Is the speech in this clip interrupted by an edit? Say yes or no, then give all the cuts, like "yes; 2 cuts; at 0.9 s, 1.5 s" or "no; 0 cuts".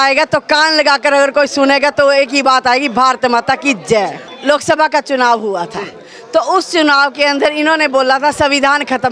yes; 1 cut; at 4.3 s